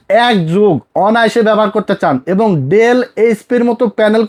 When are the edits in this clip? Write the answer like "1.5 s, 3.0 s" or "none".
none